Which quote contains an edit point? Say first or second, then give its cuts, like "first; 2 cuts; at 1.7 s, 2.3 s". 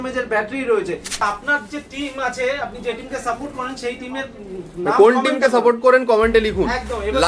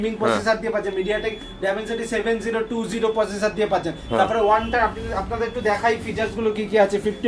first; 1 cut; at 1.2 s